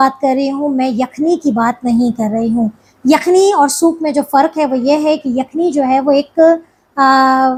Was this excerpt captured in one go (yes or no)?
yes